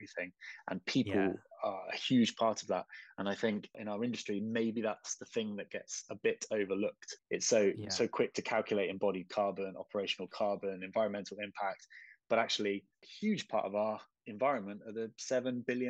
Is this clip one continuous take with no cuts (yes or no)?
yes